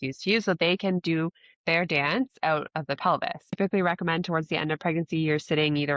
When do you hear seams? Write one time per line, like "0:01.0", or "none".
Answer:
0:03.4